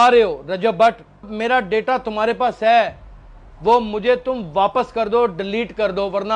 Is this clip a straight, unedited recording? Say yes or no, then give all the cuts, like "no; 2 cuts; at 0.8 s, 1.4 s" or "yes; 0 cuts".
no; 1 cut; at 1.3 s